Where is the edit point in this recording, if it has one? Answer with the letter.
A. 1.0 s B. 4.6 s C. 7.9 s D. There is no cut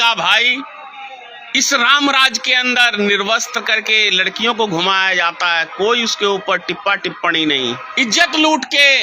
C